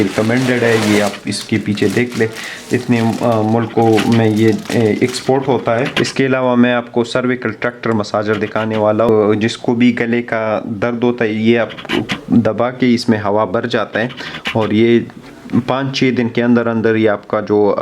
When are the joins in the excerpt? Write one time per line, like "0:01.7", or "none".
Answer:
0:05.9
0:09.1

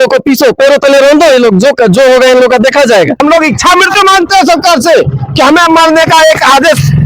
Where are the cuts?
0:03.2

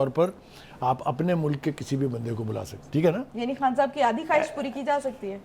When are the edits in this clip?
0:02.7

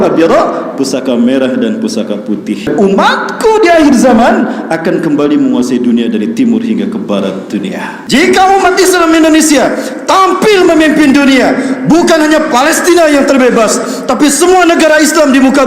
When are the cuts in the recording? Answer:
0:02.7
0:07.9

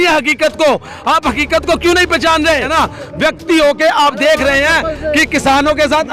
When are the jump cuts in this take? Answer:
0:02.7

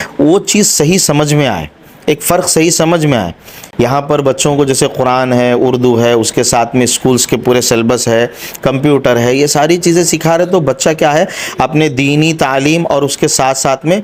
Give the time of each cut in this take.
none

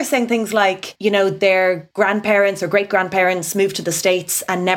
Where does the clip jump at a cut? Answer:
0:00.9
0:01.9

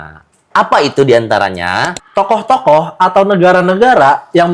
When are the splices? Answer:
0:01.9

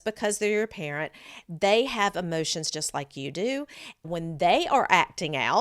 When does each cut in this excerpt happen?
0:01.4
0:04.1

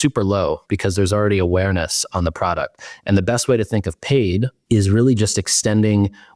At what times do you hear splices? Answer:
0:04.6

